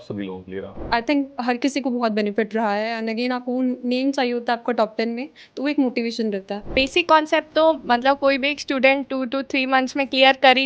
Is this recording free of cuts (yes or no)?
no